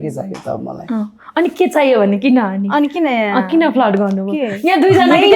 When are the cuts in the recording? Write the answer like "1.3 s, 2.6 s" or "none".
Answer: none